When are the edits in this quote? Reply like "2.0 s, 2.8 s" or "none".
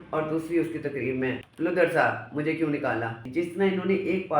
1.5 s, 3.2 s

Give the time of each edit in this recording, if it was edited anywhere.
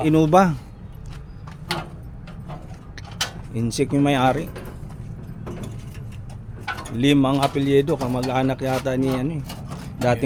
none

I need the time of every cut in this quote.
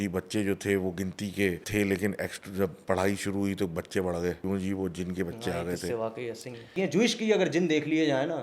1.6 s, 4.4 s, 6.7 s

